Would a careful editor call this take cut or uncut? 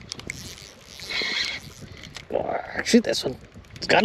uncut